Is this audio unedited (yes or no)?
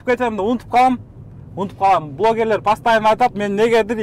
yes